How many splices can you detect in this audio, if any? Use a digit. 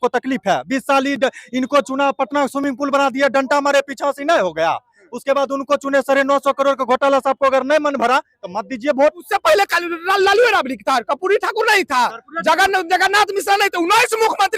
1